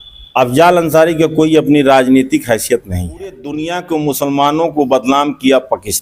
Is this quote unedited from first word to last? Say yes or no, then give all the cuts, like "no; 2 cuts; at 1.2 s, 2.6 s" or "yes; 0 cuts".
no; 1 cut; at 3.6 s